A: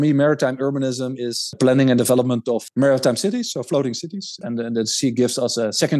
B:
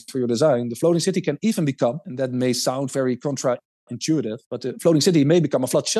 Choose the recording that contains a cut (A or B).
A